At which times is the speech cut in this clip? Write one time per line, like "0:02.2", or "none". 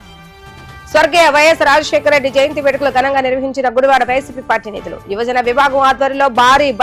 0:00.9